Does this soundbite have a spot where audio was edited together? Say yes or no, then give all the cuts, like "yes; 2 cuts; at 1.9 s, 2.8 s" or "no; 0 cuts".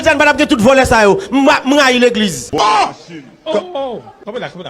yes; 1 cut; at 2.4 s